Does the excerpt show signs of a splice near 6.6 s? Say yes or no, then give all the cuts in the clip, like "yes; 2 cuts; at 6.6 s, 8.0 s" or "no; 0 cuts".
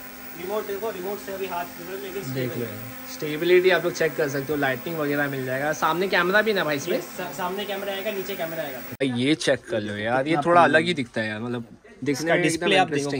no; 1 cut; at 9.0 s